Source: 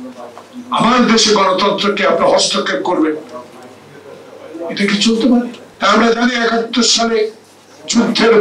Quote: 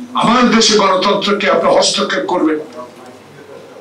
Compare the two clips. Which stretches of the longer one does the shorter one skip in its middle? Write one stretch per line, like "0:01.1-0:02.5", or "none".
none